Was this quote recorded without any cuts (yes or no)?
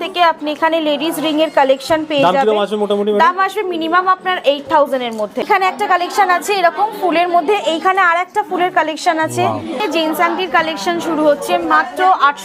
no